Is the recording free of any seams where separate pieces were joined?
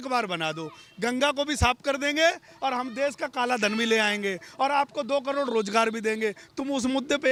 yes; 0 cuts

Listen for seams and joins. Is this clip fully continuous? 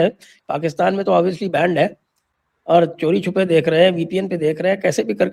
yes; 0 cuts

